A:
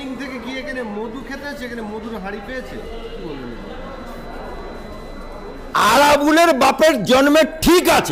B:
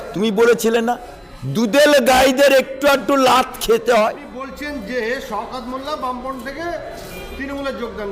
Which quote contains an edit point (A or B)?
B